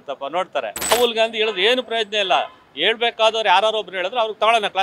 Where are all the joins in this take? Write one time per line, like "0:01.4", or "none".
0:00.9